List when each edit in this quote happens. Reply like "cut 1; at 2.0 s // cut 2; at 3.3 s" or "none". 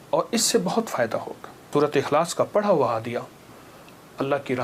cut 1; at 1.7 s

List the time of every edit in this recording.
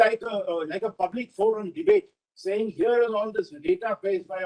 none

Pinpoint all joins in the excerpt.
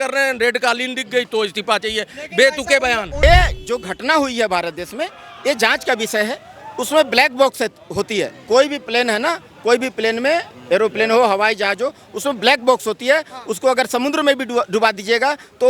cut 1; at 3.2 s

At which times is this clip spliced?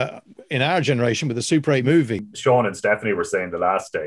cut 1; at 1.9 s

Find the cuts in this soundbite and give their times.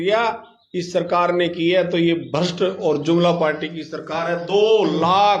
none

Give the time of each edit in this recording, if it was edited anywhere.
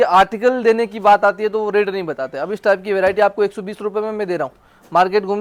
none

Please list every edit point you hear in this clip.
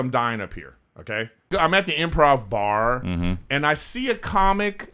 cut 1; at 1.5 s

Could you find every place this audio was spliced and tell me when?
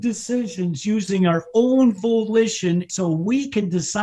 cut 1; at 2.9 s

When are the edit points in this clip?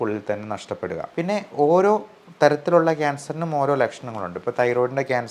cut 1; at 1.1 s

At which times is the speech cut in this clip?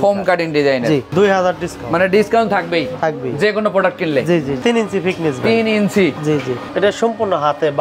cut 1; at 1.1 s // cut 2; at 4.6 s // cut 3; at 6.6 s

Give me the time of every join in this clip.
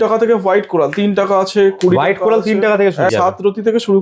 cut 1; at 3.1 s

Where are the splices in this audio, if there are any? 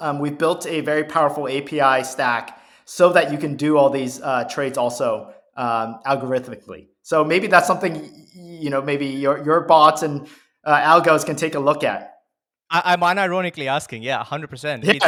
none

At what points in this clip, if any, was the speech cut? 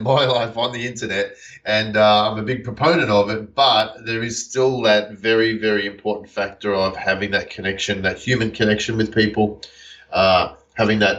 none

